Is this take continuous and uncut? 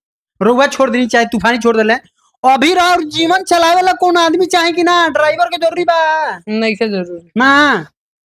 yes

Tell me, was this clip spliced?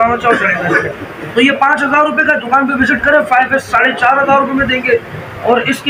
no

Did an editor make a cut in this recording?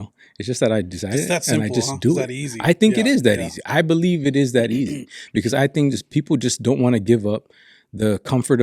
no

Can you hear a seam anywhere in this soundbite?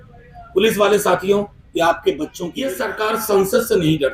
yes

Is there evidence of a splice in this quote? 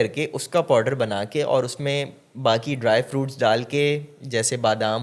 no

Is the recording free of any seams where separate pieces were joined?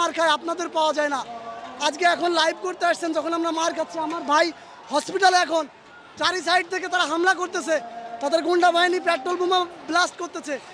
yes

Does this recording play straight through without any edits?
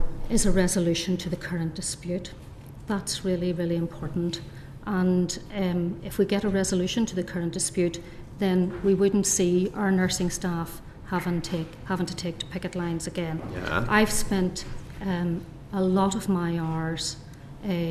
yes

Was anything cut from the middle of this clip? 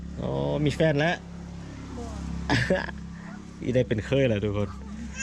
no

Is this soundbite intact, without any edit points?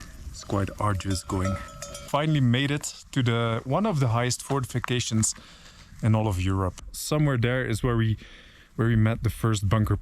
no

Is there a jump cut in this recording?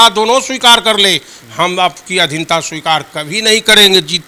no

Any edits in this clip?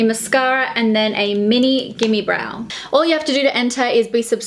yes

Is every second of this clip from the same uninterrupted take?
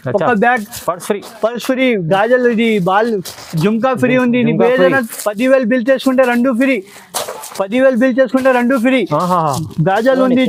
yes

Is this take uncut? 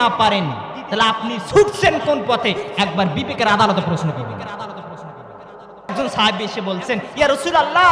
no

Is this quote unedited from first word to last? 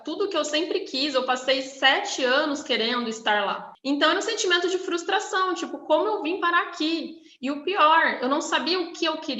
no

